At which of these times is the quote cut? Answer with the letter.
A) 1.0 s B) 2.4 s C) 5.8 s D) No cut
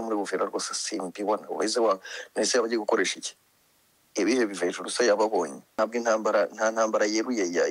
C